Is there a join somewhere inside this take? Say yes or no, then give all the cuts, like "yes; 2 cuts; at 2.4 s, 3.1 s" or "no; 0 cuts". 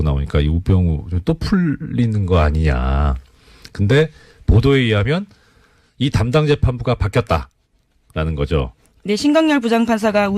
yes; 1 cut; at 4.7 s